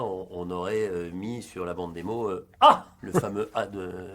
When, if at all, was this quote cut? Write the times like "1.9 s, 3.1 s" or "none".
2.9 s